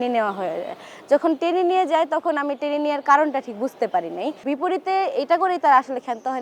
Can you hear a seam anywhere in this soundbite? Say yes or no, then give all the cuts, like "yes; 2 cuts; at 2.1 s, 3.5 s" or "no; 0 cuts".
yes; 1 cut; at 4.4 s